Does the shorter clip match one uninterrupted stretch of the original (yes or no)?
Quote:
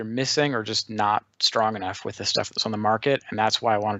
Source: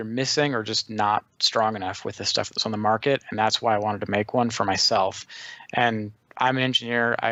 yes